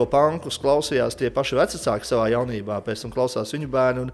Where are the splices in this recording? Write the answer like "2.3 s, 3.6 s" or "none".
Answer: none